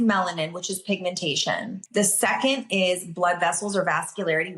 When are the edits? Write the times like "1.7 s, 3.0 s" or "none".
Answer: 1.8 s